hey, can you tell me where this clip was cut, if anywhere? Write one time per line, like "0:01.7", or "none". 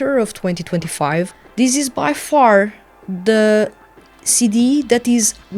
0:01.4

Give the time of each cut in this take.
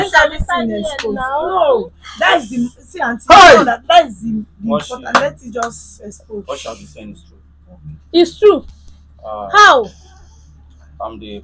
none

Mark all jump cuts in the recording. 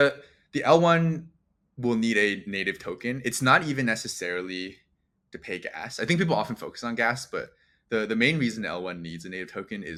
none

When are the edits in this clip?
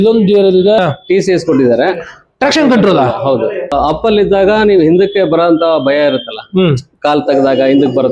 0:00.8
0:03.7

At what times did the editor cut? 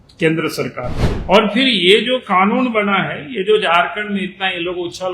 0:01.0

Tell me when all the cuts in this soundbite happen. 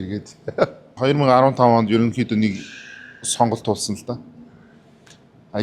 0:01.0

